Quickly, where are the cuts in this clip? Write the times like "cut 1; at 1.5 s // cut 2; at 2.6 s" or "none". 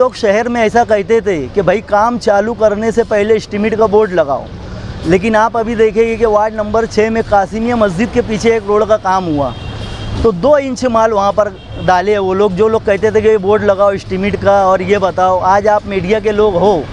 none